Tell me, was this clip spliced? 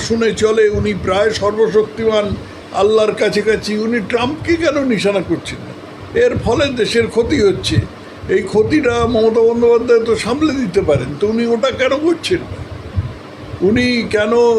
no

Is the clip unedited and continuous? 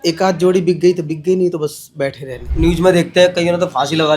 no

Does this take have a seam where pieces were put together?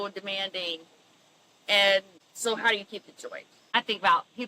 yes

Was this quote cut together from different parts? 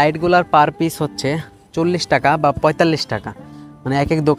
no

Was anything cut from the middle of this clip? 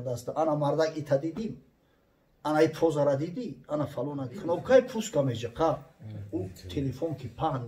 yes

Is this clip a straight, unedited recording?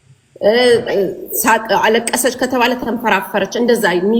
yes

